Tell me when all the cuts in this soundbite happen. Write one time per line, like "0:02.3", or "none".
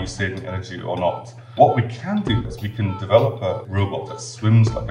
0:01.5
0:02.4
0:04.0